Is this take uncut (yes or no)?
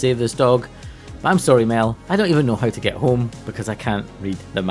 yes